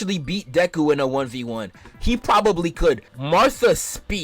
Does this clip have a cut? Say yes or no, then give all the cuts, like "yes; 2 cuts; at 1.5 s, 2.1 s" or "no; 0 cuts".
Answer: yes; 1 cut; at 3.1 s